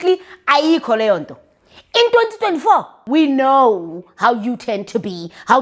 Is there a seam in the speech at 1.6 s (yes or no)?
no